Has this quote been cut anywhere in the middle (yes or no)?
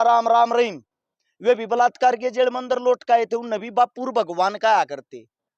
no